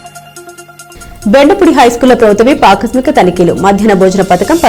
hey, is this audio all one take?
no; 1 cut; at 0.9 s

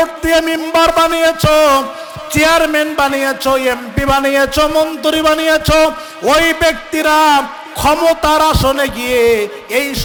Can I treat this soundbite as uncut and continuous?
yes; 0 cuts

